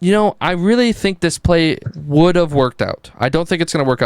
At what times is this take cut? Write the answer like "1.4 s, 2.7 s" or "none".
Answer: 1.9 s